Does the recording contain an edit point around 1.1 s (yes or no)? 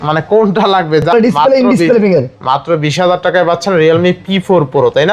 yes